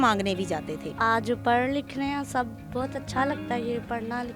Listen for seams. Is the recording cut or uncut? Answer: cut